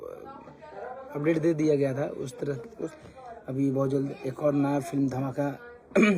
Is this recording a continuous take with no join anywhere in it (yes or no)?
no